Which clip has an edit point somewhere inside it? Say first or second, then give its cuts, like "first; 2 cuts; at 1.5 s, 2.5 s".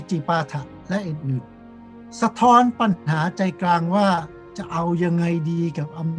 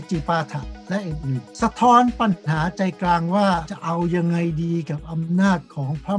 second; 2 cuts; at 1.5 s, 3.7 s